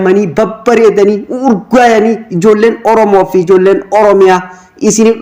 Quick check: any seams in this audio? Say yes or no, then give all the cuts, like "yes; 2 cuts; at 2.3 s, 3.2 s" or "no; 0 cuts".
no; 0 cuts